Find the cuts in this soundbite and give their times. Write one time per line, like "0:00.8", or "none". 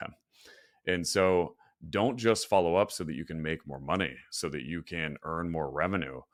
none